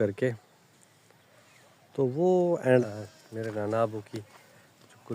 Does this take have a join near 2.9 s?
yes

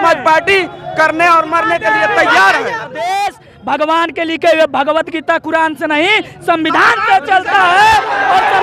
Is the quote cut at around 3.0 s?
yes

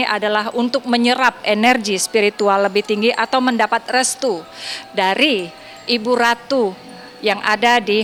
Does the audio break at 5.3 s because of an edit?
no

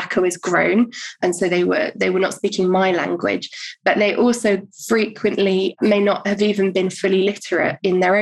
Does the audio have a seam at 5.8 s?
yes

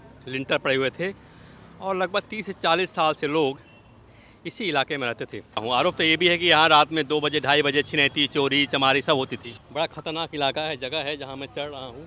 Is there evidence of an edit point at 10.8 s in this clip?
no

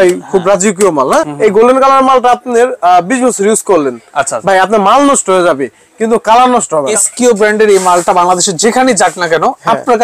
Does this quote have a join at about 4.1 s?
no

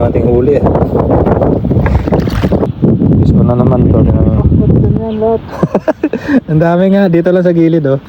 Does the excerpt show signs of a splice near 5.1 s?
no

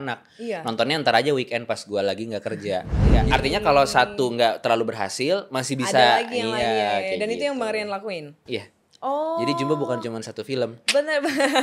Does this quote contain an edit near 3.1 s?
yes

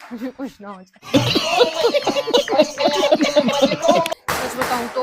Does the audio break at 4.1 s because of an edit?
yes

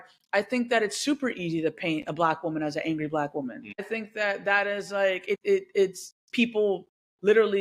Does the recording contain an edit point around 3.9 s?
yes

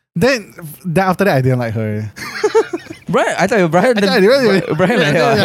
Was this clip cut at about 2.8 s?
no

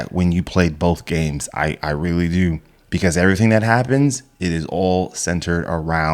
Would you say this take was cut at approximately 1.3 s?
no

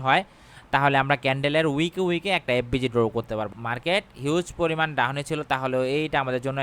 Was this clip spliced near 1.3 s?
no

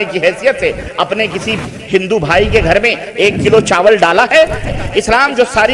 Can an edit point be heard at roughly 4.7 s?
yes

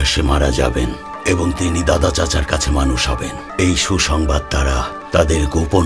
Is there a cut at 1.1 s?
yes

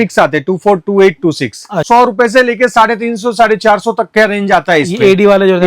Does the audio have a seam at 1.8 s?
yes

